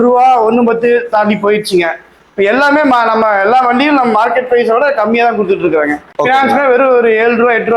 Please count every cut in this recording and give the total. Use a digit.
1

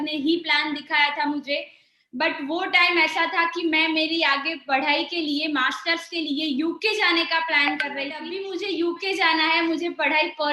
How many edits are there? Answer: 1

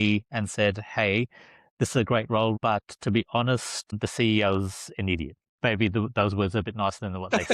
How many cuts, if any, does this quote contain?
1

